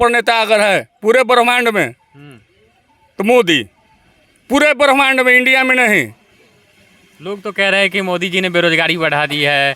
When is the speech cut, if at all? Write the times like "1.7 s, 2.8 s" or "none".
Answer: none